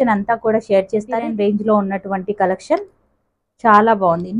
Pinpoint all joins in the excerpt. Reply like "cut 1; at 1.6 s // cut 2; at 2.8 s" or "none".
cut 1; at 1.3 s